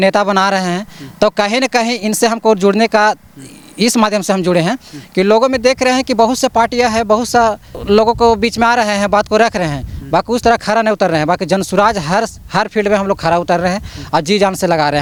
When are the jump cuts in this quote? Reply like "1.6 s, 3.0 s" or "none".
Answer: none